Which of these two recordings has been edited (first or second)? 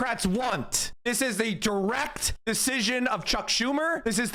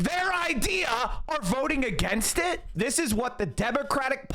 second